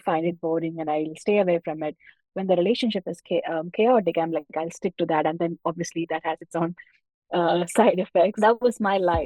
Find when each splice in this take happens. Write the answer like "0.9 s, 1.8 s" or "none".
8.3 s